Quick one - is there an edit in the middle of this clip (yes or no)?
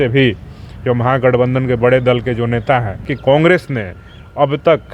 yes